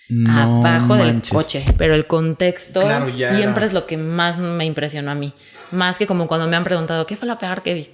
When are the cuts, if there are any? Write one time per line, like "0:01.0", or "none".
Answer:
0:01.6